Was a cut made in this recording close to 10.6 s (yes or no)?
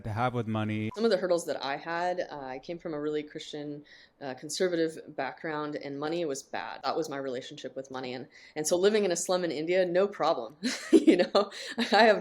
no